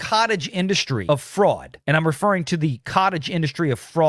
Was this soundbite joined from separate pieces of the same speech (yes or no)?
yes